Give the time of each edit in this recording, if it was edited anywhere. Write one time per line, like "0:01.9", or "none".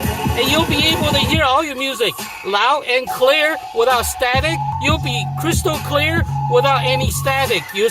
0:04.7